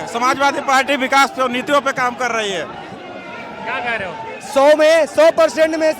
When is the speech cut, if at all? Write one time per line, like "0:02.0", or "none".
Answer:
none